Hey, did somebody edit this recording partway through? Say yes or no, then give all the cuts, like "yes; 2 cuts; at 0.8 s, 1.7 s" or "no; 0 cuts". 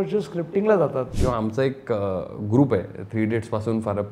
yes; 1 cut; at 1.1 s